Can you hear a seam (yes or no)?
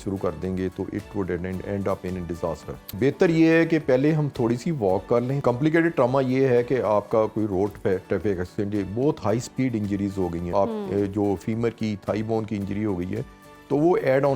yes